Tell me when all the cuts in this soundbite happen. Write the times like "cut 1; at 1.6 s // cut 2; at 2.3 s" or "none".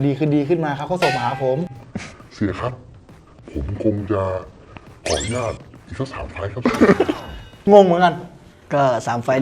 cut 1; at 7.6 s